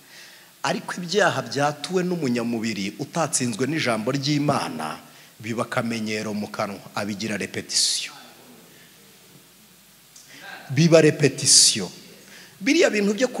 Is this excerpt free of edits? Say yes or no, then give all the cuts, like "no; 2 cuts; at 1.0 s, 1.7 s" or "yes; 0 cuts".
yes; 0 cuts